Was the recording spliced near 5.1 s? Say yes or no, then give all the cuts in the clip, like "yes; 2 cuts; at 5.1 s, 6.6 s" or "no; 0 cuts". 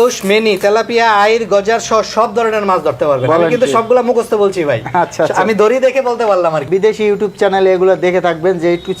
no; 1 cut; at 6.7 s